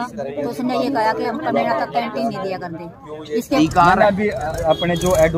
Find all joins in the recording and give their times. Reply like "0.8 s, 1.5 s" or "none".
3.6 s